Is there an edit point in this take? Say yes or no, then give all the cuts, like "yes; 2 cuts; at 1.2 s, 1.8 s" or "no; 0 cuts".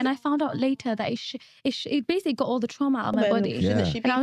no; 0 cuts